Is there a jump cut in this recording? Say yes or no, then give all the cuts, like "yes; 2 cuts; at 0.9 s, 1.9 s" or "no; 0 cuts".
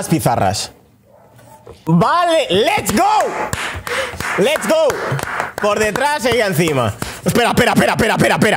yes; 1 cut; at 1.1 s